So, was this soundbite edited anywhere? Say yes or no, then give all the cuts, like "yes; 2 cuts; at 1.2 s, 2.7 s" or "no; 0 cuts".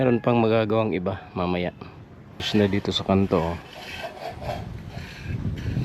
yes; 1 cut; at 2.5 s